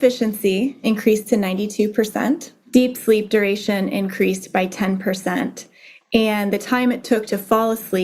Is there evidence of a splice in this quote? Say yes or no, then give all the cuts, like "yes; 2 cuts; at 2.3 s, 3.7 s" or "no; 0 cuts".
yes; 2 cuts; at 0.8 s, 2.5 s